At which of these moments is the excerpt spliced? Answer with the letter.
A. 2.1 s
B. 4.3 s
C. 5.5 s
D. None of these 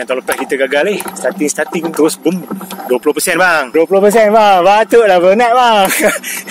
D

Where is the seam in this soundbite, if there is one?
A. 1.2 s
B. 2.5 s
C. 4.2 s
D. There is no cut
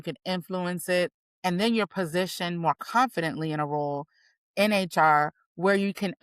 A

